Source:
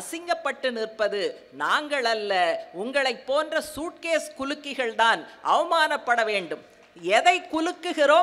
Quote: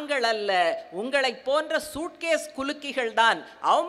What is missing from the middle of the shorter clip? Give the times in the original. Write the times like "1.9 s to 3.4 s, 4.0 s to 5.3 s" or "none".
none